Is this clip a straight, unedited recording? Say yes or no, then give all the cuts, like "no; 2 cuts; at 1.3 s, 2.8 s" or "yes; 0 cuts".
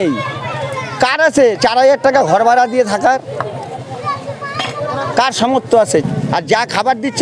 no; 1 cut; at 6.0 s